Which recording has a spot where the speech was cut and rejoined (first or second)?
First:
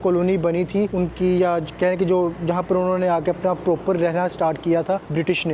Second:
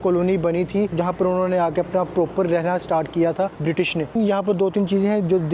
second